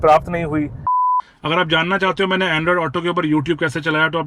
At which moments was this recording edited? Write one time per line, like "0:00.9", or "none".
0:01.1